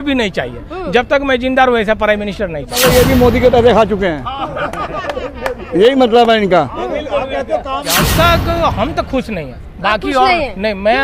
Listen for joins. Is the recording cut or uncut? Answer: cut